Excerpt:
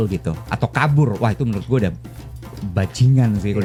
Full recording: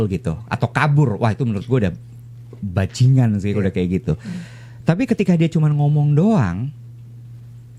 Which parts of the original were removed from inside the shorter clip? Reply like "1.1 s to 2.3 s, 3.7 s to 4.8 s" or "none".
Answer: none